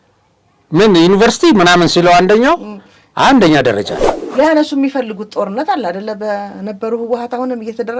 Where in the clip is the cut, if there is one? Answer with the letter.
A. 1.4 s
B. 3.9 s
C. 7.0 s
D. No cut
B